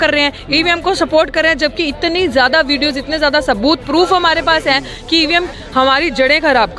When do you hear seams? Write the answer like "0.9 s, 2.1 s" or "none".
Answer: 5.5 s

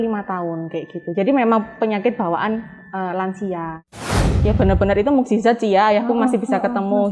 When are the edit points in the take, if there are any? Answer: 4.1 s

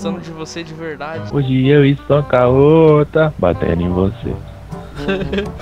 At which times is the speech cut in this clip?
1.2 s

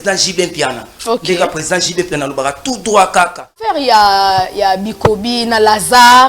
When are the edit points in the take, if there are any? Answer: 3.7 s

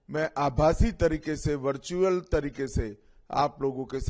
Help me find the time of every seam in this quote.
none

